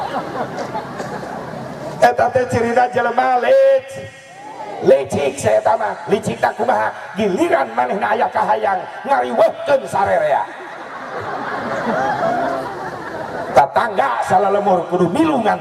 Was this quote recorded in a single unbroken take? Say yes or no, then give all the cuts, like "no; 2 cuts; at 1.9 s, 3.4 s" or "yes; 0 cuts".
yes; 0 cuts